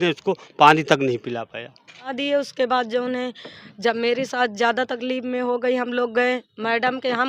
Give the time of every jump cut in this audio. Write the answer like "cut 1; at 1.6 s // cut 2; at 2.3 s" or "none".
cut 1; at 2.1 s